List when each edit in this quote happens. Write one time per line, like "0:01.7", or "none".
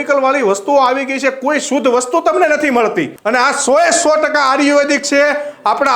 0:03.1